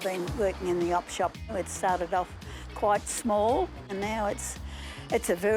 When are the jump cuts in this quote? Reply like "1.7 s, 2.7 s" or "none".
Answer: 1.5 s, 3.9 s